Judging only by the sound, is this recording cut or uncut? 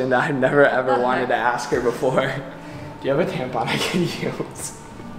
uncut